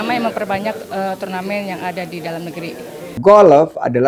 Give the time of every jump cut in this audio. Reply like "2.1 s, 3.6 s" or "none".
3.0 s